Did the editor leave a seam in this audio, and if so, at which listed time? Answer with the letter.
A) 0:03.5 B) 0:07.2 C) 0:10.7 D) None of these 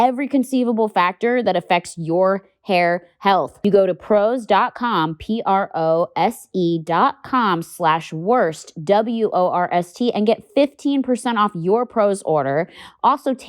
A